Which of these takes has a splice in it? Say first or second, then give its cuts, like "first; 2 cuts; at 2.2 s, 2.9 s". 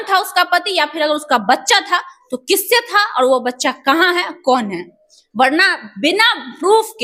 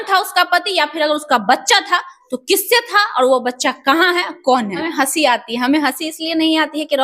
second; 1 cut; at 4.8 s